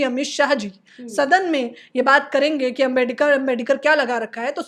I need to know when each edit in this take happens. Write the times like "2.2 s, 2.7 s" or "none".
none